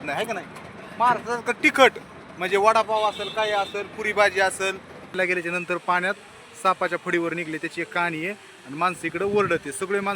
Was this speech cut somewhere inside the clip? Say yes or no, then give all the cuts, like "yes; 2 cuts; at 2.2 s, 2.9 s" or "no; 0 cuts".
yes; 1 cut; at 5.2 s